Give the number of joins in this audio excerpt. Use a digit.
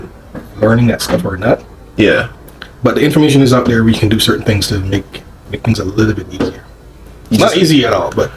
0